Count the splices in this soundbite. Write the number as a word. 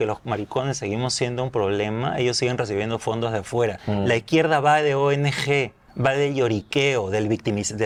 zero